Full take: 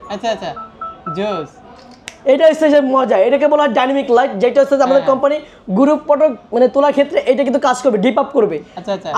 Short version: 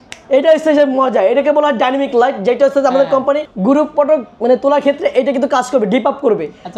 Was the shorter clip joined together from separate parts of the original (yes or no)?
yes